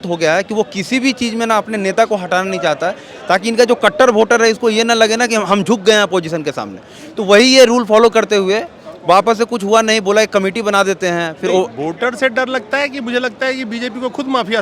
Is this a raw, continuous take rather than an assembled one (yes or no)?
yes